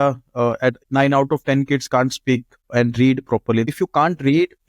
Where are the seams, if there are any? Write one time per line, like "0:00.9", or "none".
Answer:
0:00.8
0:03.7